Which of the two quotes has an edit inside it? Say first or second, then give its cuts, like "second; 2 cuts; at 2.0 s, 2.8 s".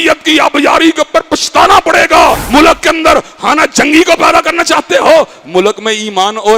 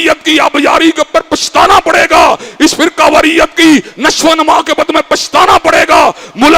first; 1 cut; at 2.4 s